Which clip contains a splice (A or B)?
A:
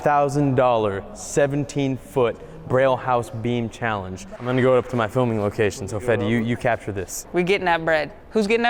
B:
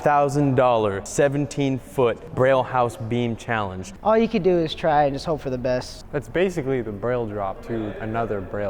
B